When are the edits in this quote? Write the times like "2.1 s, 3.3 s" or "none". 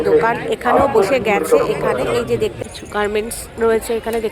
2.6 s